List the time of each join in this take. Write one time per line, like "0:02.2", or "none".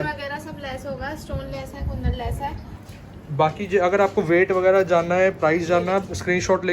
0:02.8